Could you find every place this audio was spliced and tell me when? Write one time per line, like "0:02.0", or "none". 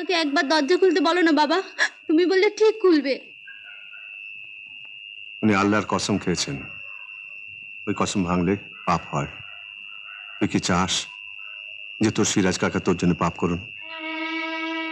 none